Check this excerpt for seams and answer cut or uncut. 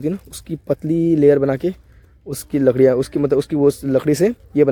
uncut